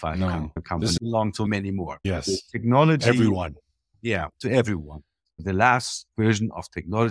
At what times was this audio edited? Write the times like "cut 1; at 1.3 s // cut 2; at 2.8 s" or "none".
cut 1; at 1.0 s // cut 2; at 2.0 s